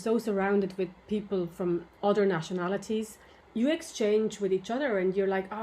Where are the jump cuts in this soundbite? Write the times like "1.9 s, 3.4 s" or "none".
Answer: 1.9 s, 3.4 s

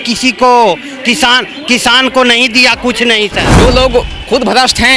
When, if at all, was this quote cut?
3.5 s

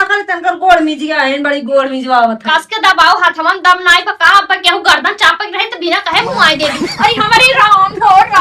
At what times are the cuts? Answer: none

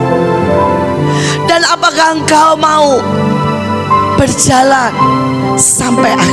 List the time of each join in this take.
none

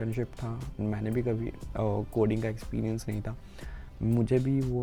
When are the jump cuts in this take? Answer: none

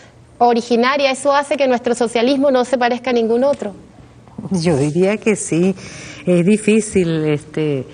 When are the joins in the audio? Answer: 3.7 s

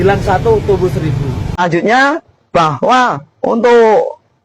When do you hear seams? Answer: 1.5 s

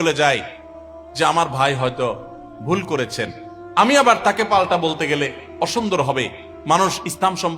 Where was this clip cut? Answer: none

